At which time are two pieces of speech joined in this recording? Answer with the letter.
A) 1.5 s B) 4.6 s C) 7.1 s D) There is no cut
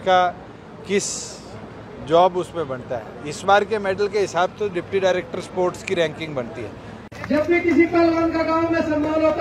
C